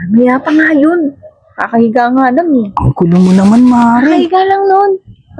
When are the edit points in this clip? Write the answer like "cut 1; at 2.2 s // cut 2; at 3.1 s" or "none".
none